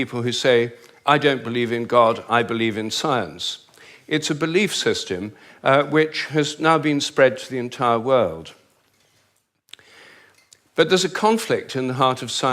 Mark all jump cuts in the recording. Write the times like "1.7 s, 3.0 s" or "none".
7.1 s